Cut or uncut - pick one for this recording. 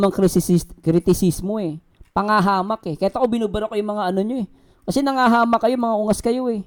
uncut